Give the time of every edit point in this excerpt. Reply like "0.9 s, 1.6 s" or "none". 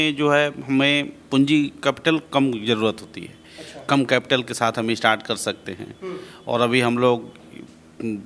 none